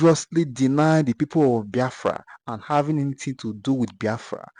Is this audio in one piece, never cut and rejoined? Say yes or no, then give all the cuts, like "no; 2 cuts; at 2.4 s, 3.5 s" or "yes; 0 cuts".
yes; 0 cuts